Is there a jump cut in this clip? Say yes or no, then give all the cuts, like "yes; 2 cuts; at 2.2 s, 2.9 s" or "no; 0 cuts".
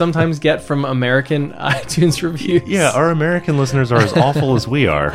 no; 0 cuts